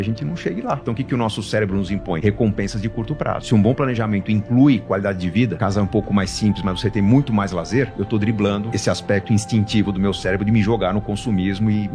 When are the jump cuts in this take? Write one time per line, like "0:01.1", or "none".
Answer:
0:00.8
0:02.2
0:03.4
0:05.6
0:07.9
0:08.7